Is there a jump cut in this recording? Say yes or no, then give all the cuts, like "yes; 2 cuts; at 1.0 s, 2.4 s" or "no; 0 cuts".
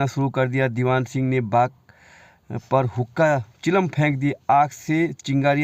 no; 0 cuts